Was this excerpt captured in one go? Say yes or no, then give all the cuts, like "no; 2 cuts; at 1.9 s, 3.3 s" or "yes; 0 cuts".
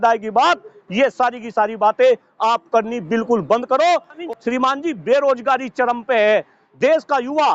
no; 1 cut; at 4.2 s